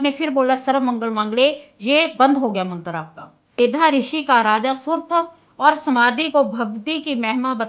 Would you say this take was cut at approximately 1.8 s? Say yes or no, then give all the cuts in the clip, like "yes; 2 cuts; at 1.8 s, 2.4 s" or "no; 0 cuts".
no; 1 cut; at 3.6 s